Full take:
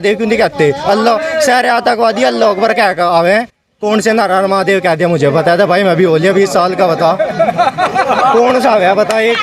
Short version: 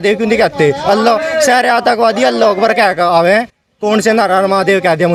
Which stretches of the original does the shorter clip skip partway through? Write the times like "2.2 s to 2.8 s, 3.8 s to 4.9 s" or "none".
none